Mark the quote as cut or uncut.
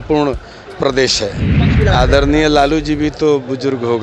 cut